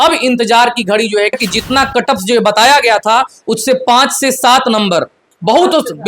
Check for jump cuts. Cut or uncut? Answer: cut